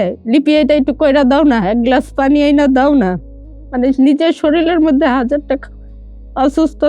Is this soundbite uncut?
yes; 0 cuts

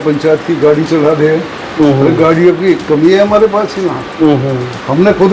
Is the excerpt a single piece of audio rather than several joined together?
yes; 0 cuts

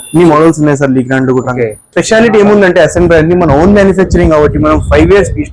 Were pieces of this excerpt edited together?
yes; 1 cut; at 1.9 s

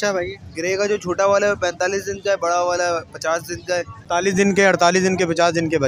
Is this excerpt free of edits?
no; 1 cut; at 4.0 s

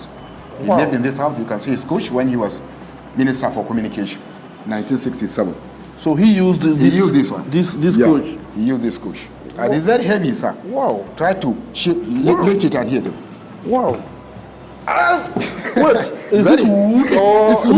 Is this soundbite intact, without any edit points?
yes; 0 cuts

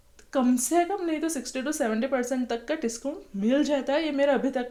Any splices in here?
no; 0 cuts

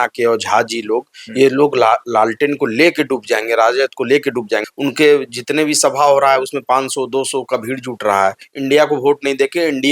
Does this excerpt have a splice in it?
yes; 2 cuts; at 4.6 s, 8.5 s

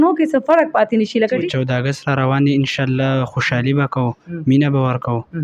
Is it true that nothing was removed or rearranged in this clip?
no; 1 cut; at 1.5 s

